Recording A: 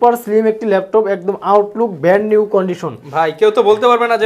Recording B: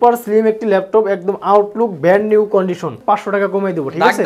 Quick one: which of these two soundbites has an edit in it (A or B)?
B